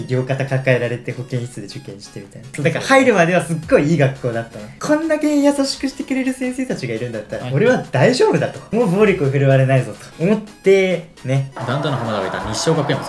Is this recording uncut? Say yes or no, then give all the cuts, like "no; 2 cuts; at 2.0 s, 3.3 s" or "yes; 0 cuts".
no; 3 cuts; at 2.4 s, 8.6 s, 11.5 s